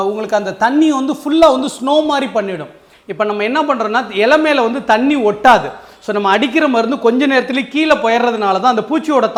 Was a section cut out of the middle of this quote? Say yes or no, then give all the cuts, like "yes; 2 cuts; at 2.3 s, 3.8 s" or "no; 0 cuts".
no; 0 cuts